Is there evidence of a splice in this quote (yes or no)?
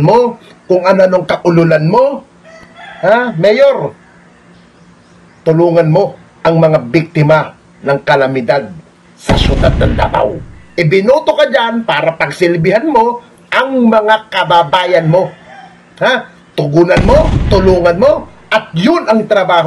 yes